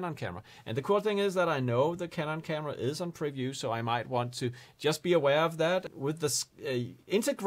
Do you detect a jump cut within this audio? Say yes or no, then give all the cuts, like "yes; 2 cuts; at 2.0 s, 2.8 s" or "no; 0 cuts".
yes; 1 cut; at 5.9 s